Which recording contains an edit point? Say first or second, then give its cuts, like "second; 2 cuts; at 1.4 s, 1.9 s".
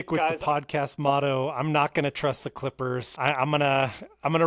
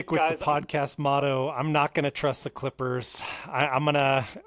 first; 1 cut; at 3.1 s